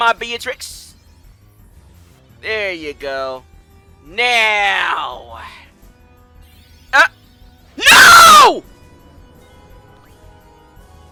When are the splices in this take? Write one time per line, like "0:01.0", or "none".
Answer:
none